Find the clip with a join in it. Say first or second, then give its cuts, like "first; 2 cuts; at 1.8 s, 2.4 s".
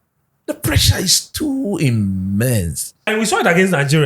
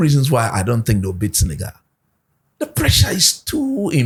first; 1 cut; at 3.1 s